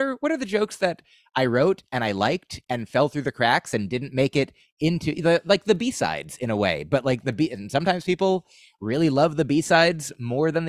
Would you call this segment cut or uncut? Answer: uncut